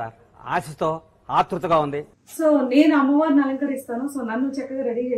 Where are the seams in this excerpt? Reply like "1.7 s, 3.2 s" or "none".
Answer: 2.2 s

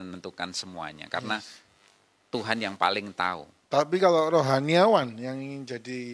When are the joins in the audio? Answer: 3.5 s

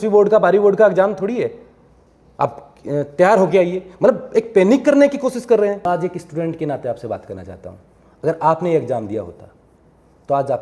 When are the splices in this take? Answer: 5.8 s

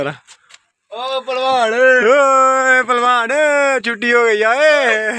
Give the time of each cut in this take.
none

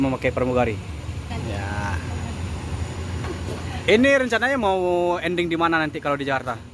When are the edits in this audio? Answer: 1.3 s

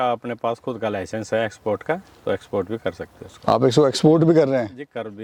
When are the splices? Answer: none

